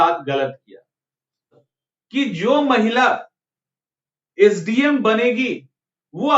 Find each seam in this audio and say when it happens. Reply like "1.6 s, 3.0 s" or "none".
1.6 s